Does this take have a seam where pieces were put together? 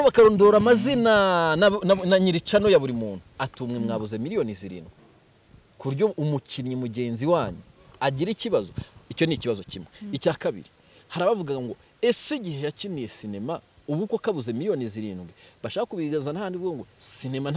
no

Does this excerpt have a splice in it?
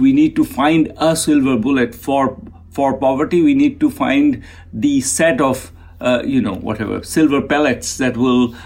no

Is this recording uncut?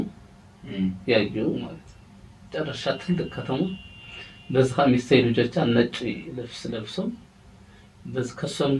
yes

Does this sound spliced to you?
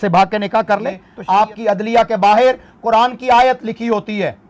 yes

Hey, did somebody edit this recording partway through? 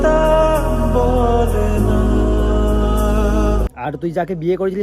yes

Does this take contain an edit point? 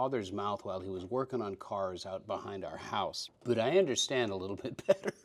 yes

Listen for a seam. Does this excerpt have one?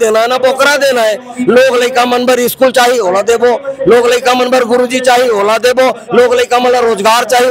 no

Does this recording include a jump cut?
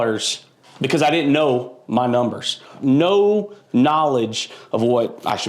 yes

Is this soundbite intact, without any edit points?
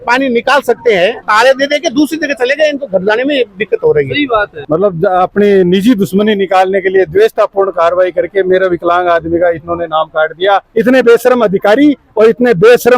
no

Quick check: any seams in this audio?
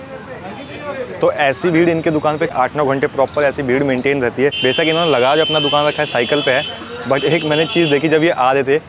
yes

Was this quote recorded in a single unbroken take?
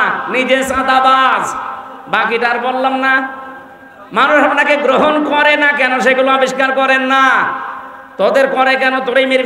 yes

